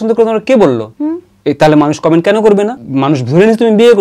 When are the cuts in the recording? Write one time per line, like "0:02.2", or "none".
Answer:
0:00.9
0:02.8